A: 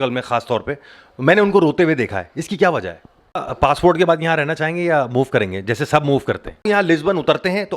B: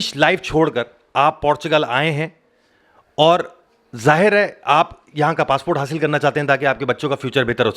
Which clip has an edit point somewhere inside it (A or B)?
A